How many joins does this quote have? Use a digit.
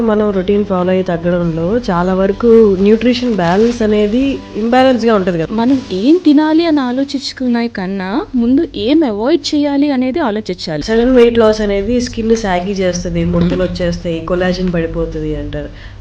3